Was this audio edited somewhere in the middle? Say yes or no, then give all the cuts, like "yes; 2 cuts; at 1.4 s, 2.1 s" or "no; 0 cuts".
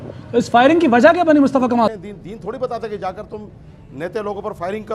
yes; 1 cut; at 1.9 s